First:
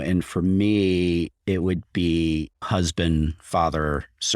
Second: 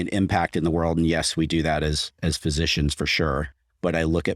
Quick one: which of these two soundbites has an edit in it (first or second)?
first